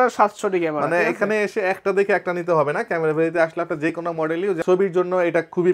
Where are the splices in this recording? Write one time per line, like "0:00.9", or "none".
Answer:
0:04.6